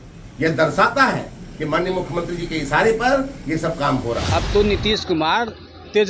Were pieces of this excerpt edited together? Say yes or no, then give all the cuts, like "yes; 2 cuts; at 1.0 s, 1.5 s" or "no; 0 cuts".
yes; 1 cut; at 4.3 s